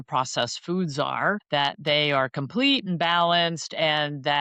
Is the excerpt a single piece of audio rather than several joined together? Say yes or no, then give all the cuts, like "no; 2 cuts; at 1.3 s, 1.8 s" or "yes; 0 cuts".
no; 1 cut; at 1.4 s